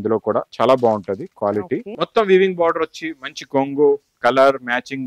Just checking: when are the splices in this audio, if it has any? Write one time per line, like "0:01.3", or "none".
0:01.9